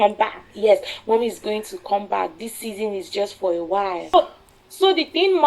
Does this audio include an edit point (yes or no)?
yes